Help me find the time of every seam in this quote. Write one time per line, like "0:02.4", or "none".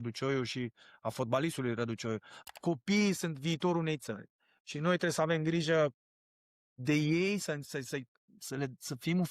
0:02.3